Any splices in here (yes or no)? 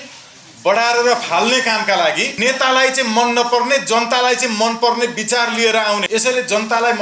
yes